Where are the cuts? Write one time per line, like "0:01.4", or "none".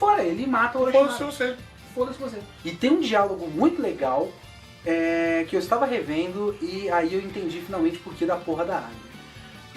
0:07.1